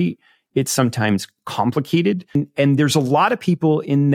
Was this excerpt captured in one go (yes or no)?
no